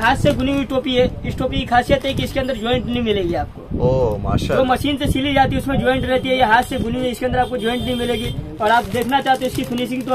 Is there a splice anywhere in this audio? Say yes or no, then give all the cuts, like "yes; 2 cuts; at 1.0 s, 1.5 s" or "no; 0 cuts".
no; 0 cuts